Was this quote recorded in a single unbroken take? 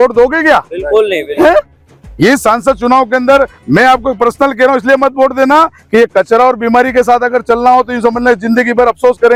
yes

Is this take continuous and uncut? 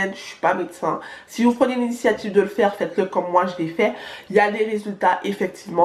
yes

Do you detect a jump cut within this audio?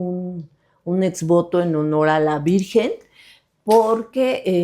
no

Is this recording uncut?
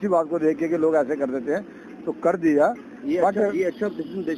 yes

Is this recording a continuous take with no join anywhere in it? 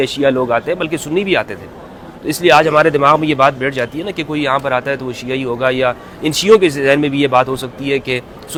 yes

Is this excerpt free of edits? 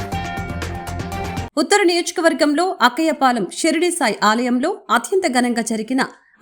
no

